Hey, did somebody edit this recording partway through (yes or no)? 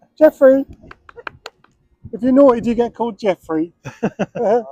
no